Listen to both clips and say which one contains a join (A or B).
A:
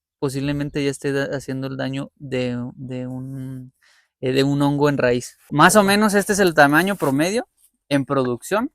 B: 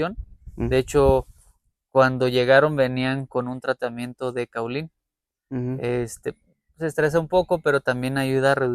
A